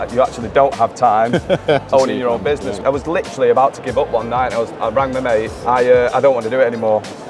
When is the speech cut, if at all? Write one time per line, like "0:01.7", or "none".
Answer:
0:02.8
0:05.5

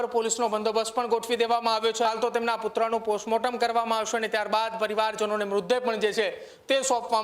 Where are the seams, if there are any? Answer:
0:02.1

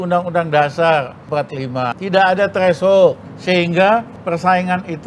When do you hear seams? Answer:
0:01.5
0:03.3
0:04.1

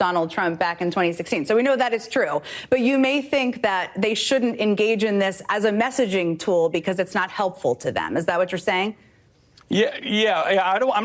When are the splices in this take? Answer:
0:08.1

